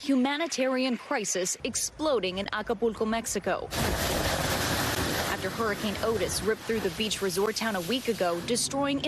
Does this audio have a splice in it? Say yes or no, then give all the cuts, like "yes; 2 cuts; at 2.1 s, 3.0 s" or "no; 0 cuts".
yes; 1 cut; at 6.2 s